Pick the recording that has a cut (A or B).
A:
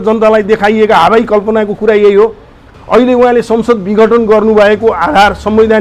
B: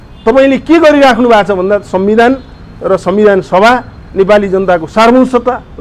A